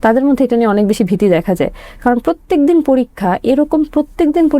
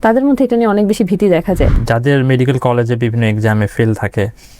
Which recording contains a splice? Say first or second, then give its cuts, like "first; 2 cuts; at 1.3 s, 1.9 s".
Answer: second; 1 cut; at 1.8 s